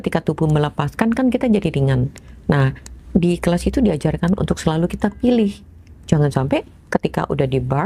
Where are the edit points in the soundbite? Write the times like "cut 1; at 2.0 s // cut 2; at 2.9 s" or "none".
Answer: none